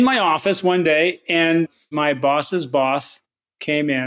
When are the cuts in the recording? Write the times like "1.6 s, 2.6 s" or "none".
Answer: 1.9 s